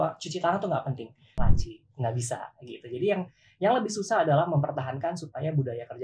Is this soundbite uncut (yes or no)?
no